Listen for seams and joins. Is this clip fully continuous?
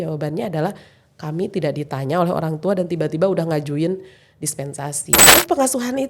no; 1 cut; at 5.2 s

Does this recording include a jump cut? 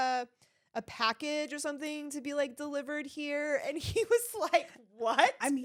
no; 0 cuts

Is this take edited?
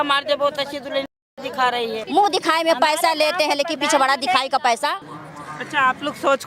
yes; 2 cuts; at 2.0 s, 5.1 s

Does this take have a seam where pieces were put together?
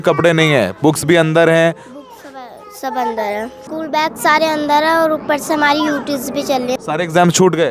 yes; 2 cuts; at 3.6 s, 6.6 s

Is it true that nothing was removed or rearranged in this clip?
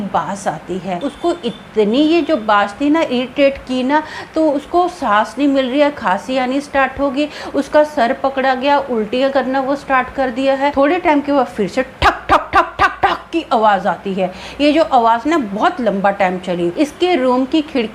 no; 3 cuts; at 1.1 s, 10.7 s, 16.7 s

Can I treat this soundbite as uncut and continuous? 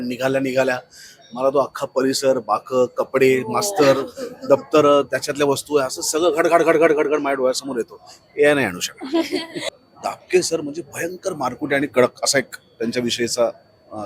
no; 1 cut; at 9.6 s

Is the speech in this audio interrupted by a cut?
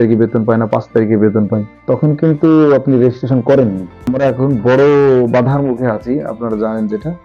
yes; 2 cuts; at 1.7 s, 4.1 s

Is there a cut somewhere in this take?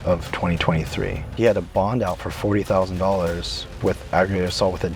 yes; 2 cuts; at 1.2 s, 3.7 s

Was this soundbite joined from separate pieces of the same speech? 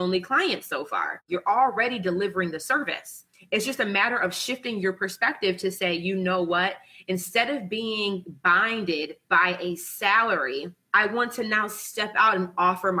yes; 2 cuts; at 1.2 s, 10.8 s

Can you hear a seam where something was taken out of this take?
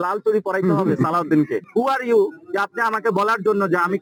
no; 0 cuts

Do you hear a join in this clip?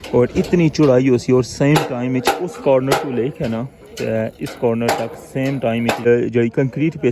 yes; 1 cut; at 6.1 s

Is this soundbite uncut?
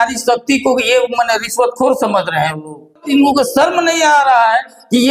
no; 1 cut; at 3.0 s

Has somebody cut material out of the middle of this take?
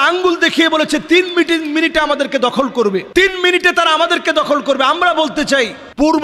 no; 0 cuts

